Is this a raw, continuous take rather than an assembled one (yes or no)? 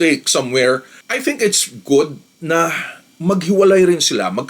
yes